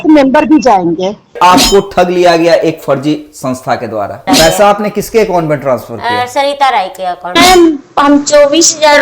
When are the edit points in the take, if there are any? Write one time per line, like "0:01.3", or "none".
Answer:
0:01.4
0:04.3
0:07.4